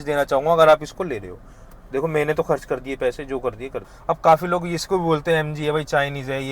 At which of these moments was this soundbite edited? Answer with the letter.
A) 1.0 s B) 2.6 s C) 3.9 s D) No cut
C